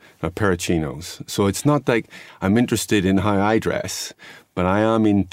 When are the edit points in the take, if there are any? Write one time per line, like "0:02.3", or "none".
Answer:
none